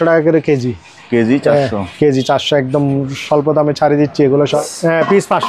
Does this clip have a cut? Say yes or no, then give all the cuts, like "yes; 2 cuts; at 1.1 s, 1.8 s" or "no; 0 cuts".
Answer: yes; 1 cut; at 4.6 s